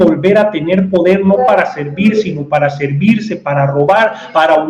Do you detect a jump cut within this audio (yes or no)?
no